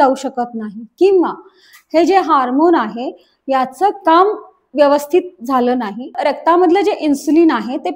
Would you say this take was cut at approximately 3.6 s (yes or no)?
no